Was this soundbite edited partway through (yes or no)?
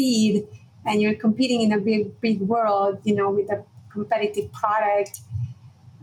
no